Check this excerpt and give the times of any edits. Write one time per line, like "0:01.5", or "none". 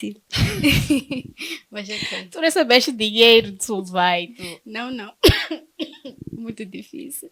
none